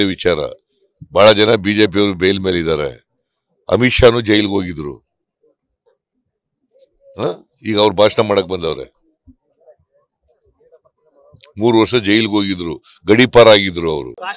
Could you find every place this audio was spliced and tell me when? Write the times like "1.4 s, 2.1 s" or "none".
none